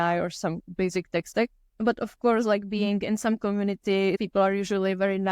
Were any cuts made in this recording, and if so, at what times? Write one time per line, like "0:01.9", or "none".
0:04.2